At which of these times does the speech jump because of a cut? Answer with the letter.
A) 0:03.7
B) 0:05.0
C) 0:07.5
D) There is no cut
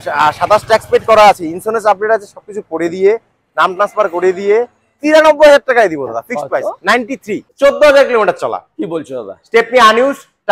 C